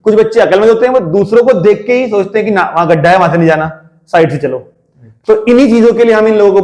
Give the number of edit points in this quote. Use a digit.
0